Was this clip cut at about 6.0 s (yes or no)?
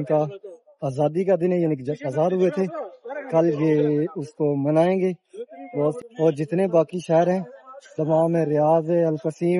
yes